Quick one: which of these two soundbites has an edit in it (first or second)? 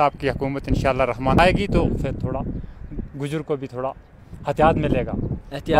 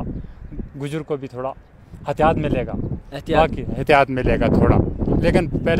first